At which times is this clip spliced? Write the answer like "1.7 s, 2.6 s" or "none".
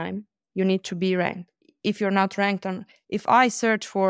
none

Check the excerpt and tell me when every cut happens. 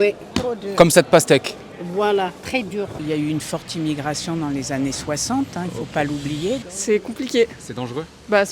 3.0 s, 6.7 s

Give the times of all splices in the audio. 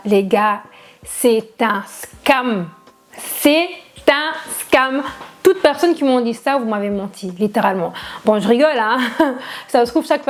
none

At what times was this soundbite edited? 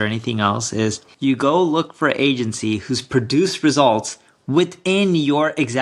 1.1 s

